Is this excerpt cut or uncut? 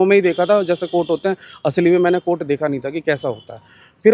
uncut